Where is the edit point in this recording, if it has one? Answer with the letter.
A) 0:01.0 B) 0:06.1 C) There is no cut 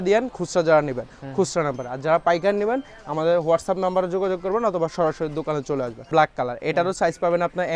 B